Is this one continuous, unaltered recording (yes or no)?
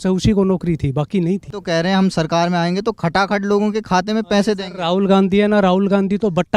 no